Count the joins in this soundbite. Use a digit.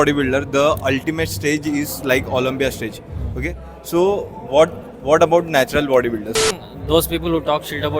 1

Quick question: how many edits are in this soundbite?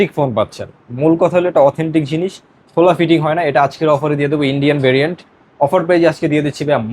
0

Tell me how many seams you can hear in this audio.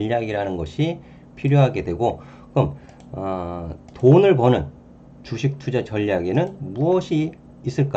0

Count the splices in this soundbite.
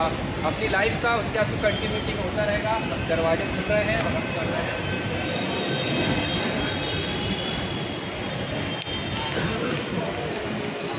0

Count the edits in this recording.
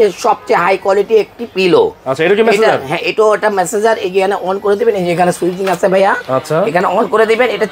0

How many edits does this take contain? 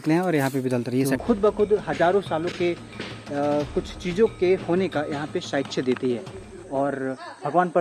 1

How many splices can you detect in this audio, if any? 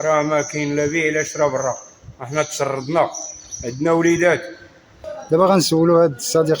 1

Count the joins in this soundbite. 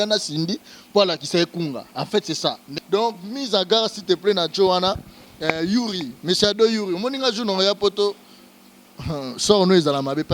1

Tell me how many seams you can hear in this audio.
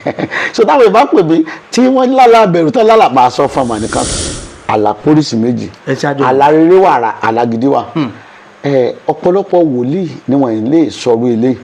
1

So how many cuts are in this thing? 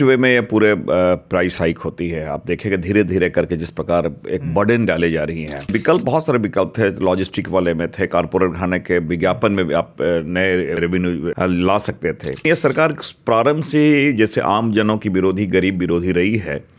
3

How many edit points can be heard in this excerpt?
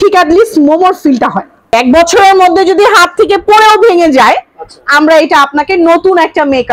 1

